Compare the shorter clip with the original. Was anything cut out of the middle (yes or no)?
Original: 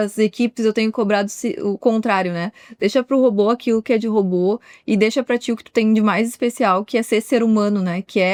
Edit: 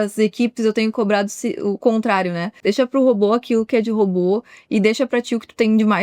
yes